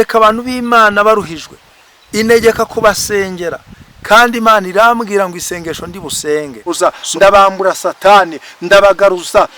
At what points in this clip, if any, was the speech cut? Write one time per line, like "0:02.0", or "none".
0:06.7